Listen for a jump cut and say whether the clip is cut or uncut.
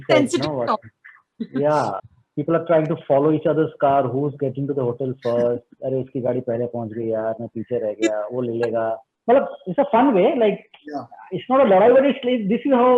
uncut